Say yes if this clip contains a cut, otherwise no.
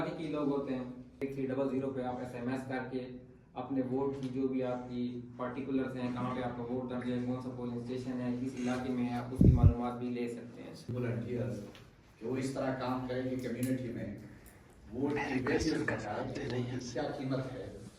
yes